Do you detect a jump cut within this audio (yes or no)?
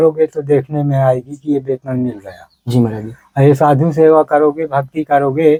no